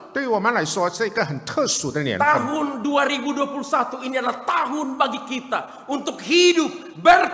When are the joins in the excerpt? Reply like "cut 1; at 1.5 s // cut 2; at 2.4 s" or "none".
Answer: none